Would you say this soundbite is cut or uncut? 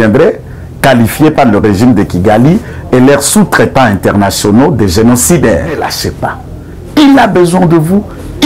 cut